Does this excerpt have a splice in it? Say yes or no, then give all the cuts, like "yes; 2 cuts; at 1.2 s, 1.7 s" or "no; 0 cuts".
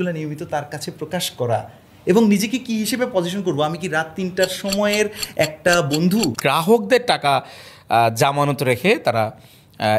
yes; 1 cut; at 6.4 s